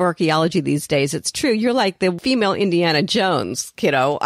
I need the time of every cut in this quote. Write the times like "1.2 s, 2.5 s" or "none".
2.2 s